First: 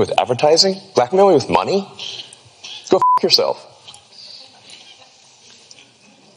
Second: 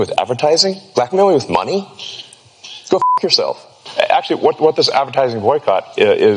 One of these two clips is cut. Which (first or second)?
second